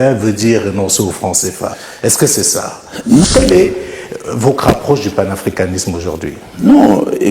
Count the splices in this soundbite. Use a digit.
1